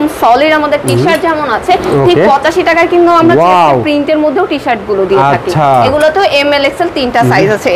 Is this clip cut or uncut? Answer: uncut